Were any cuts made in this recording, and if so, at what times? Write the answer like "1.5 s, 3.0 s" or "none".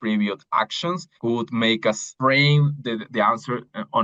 1.1 s, 2.1 s